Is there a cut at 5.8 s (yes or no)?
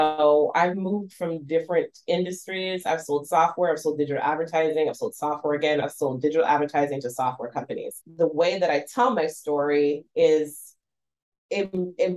yes